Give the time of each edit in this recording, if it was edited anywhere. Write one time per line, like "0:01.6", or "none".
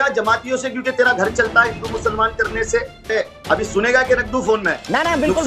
0:03.1